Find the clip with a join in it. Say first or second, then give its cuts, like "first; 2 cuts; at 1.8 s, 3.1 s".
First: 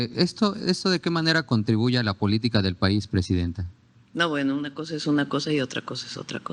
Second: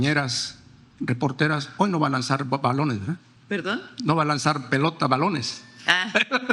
second; 1 cut; at 3.3 s